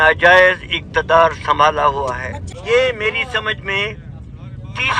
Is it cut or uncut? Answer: cut